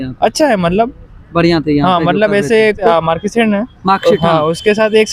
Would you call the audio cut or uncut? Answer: cut